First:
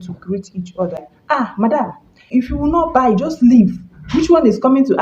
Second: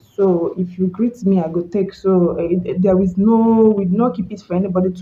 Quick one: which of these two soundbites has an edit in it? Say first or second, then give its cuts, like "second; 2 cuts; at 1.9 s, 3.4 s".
first; 2 cuts; at 1.1 s, 2.2 s